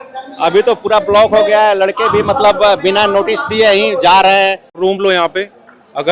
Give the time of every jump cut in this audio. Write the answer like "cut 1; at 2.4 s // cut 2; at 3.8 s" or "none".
cut 1; at 4.8 s